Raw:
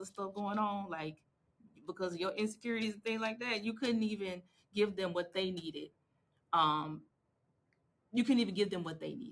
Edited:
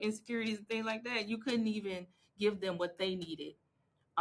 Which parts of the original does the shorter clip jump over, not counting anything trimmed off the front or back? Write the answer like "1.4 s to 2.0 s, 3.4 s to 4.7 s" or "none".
none

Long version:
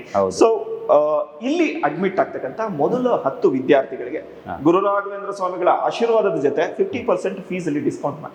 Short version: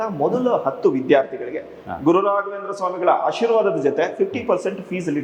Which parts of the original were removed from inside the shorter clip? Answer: none

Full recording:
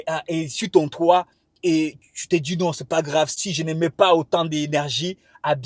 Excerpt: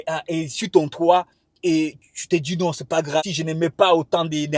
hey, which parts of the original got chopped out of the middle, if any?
3.2 s to 3.4 s

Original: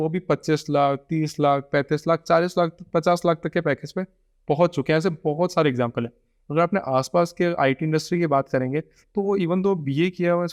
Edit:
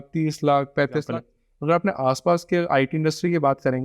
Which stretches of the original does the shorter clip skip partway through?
2.0 s to 5.9 s

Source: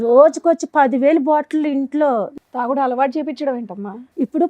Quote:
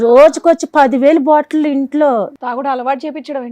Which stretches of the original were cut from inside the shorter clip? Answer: 2.4 s to 2.5 s

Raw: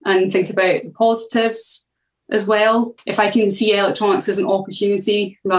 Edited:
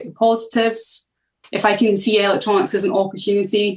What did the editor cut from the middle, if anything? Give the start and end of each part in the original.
2.2 s to 3.0 s

